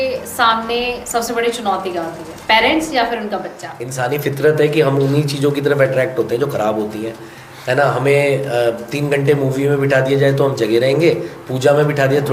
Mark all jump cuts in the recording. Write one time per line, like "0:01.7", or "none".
0:03.8